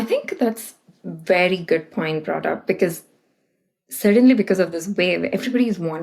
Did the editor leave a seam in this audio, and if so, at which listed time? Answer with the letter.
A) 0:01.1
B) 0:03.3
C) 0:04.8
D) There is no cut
D